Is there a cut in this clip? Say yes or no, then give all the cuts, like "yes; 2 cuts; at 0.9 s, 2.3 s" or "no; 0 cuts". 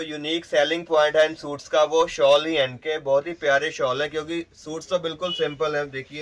no; 0 cuts